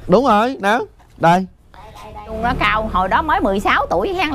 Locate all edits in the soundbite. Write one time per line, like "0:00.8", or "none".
0:02.4